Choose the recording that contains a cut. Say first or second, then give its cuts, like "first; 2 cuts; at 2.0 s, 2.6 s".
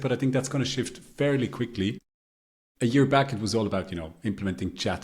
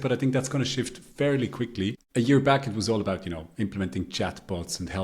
second; 1 cut; at 2.0 s